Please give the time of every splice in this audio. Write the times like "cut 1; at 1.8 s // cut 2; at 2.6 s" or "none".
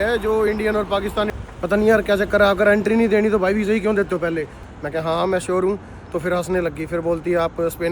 cut 1; at 1.3 s // cut 2; at 4.7 s